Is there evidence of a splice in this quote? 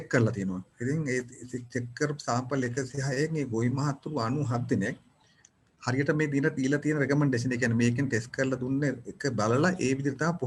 no; 0 cuts

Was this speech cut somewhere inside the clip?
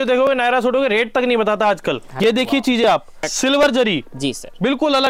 yes; 2 cuts; at 2.1 s, 3.2 s

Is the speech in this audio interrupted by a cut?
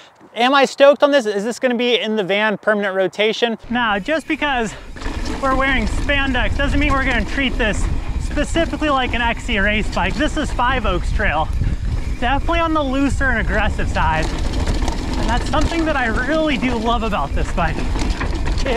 yes; 1 cut; at 3.6 s

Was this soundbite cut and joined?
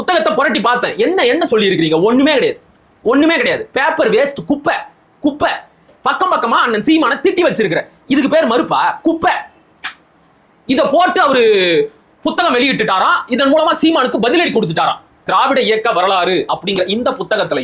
yes; 2 cuts; at 5.9 s, 15.2 s

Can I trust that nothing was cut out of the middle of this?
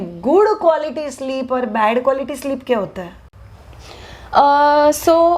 yes; 0 cuts

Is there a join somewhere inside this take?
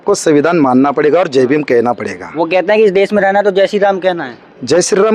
no; 0 cuts

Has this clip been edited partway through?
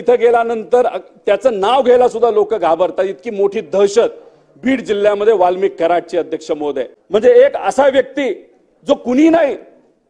yes; 1 cut; at 6.9 s

